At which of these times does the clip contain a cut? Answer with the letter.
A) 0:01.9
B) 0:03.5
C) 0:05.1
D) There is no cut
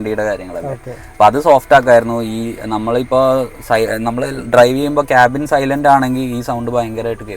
D